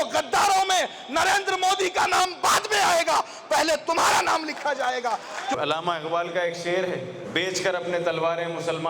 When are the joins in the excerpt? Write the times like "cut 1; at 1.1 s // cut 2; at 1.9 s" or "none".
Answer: cut 1; at 5.6 s // cut 2; at 7.2 s